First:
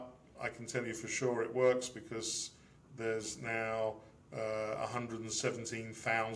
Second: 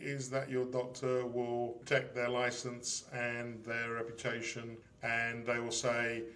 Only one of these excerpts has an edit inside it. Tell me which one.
second; 2 cuts; at 1.8 s, 4.8 s

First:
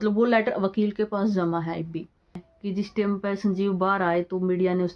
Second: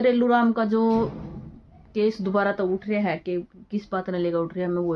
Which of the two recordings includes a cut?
first; 1 cut; at 2.5 s

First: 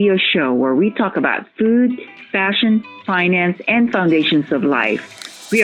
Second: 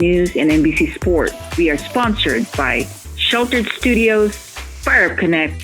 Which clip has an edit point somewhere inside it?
second; 1 cut; at 1.4 s

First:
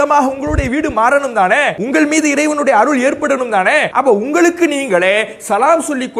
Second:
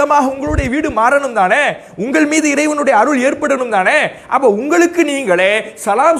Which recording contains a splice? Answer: first; 2 cuts; at 1.8 s, 3.9 s

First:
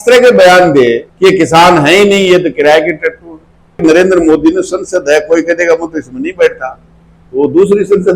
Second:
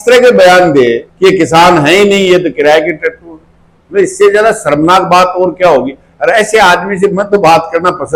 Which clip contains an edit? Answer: first; 1 cut; at 3.8 s

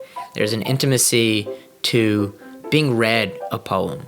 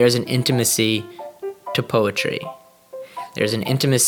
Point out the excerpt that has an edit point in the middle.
first; 1 cut; at 2.5 s

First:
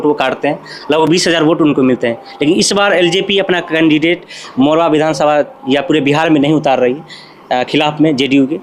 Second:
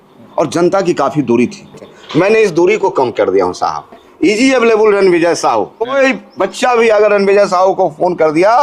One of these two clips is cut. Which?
second; 3 cuts; at 1.9 s, 4.1 s, 5.9 s

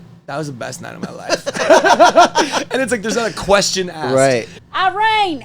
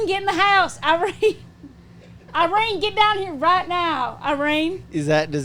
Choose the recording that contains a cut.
first; 1 cut; at 4.5 s

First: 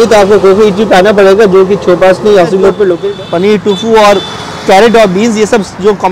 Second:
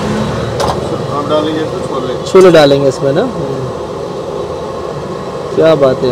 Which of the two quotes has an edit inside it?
first; 1 cut; at 3.0 s

